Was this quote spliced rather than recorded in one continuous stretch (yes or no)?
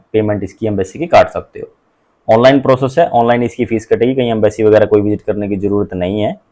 no